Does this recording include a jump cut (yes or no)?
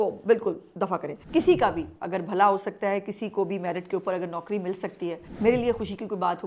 yes